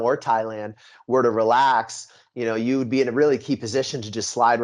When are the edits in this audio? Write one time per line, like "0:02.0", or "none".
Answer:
none